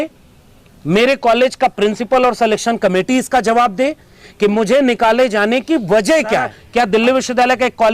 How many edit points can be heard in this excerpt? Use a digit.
1